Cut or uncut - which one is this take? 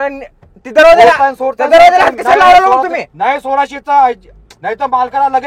uncut